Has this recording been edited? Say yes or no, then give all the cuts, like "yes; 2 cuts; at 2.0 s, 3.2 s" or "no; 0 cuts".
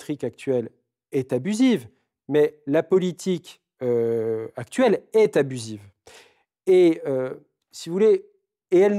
no; 0 cuts